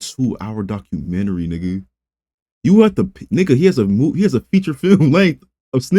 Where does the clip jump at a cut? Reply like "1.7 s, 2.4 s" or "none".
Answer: none